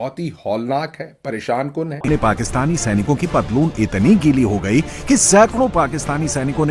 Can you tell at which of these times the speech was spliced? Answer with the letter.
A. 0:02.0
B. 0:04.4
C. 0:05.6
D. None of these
A